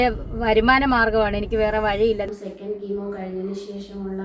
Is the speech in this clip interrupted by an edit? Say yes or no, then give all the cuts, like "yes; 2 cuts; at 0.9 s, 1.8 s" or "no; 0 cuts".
yes; 1 cut; at 2.3 s